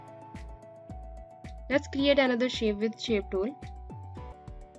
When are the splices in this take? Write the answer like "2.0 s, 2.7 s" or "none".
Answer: 1.6 s, 4.0 s